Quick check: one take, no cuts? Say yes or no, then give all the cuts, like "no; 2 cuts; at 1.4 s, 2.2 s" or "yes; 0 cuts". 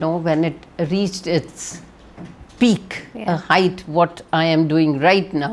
yes; 0 cuts